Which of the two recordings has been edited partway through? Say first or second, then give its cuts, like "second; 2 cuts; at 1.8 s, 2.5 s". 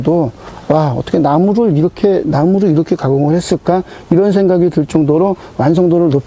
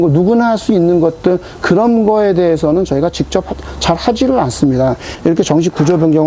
second; 1 cut; at 5.1 s